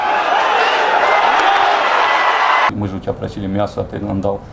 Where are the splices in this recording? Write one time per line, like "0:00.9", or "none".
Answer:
0:02.7